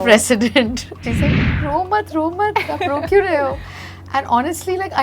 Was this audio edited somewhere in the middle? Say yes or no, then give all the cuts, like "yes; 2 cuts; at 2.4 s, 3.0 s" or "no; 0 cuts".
yes; 1 cut; at 1.1 s